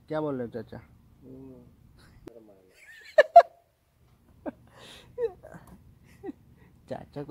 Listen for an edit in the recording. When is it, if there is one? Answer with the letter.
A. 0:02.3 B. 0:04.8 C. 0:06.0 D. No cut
A